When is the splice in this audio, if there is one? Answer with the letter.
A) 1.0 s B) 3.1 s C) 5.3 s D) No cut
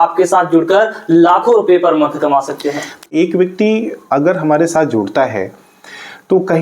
B